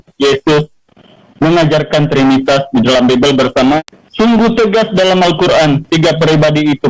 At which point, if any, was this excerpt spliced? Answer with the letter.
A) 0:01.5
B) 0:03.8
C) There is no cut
B